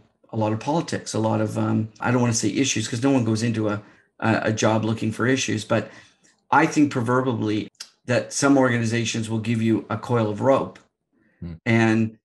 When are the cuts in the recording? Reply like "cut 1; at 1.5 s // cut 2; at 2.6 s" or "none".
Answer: cut 1; at 2.0 s // cut 2; at 7.7 s